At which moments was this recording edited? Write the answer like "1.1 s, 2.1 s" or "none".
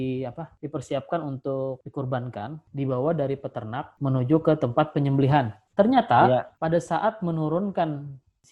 2.6 s, 3.9 s